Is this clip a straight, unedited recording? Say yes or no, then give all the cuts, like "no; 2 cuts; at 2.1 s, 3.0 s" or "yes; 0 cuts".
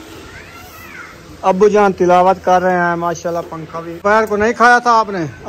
no; 1 cut; at 3.9 s